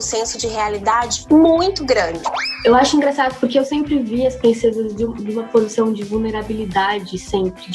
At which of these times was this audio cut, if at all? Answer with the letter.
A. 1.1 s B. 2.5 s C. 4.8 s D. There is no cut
B